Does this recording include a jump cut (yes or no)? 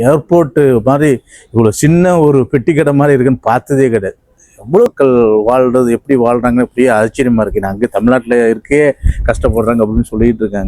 yes